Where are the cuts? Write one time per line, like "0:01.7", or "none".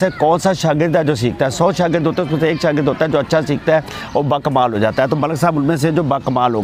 none